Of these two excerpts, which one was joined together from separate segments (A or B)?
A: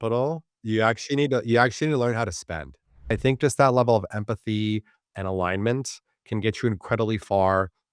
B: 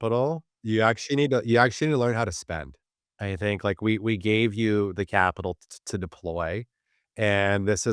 A